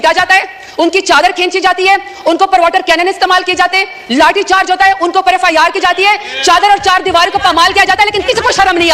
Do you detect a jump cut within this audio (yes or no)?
no